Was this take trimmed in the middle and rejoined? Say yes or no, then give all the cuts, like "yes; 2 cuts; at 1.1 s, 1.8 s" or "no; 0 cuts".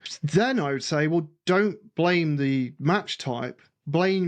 no; 0 cuts